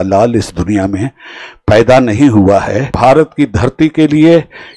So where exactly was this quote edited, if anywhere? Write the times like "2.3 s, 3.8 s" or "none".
2.9 s